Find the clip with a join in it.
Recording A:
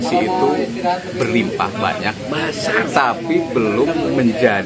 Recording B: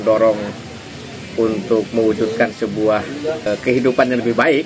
B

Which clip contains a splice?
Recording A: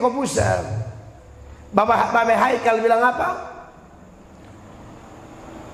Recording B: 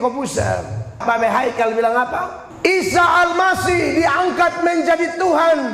B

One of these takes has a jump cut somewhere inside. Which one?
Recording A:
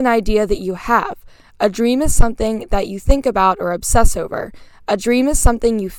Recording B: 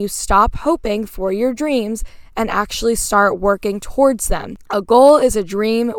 B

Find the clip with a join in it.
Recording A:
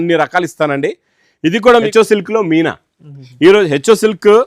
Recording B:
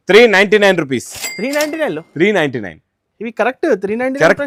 A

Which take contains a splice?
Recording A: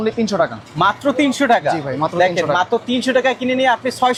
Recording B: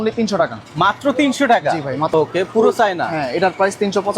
B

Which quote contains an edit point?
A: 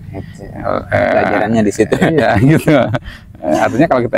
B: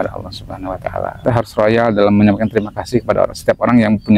B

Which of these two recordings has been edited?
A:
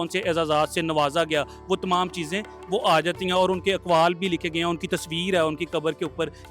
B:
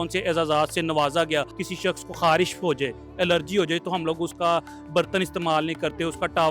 B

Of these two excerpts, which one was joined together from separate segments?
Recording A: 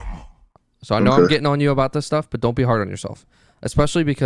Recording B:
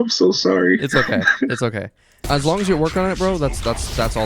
B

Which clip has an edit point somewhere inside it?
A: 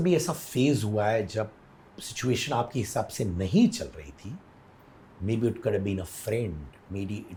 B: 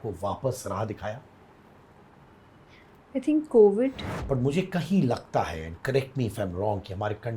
B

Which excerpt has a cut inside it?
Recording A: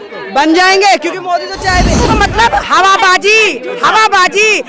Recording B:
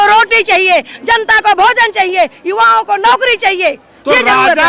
A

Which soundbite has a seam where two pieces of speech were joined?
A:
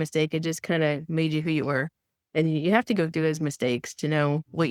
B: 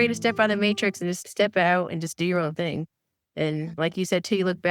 B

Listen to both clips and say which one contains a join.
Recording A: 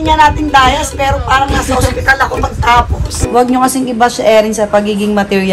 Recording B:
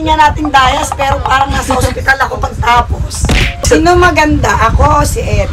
A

